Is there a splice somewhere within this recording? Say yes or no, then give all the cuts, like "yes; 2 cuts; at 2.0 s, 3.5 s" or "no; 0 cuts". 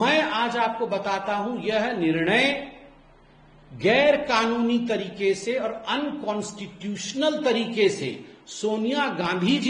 no; 0 cuts